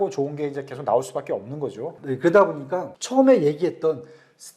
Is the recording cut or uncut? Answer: cut